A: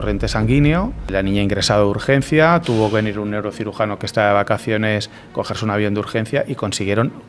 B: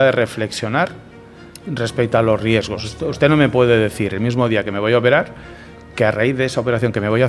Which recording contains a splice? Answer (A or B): A